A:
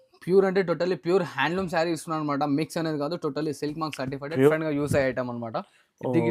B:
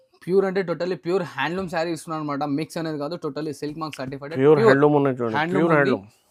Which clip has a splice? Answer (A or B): A